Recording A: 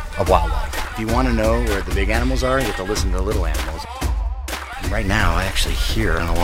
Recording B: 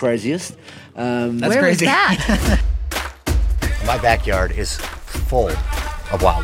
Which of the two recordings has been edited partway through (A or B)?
B